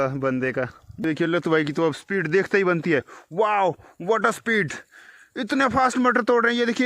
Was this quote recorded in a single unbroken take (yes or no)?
no